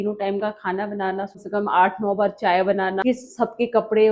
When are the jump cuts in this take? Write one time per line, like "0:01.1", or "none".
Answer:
0:01.4
0:03.0